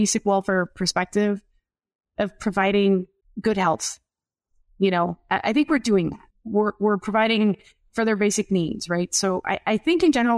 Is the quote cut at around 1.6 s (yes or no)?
no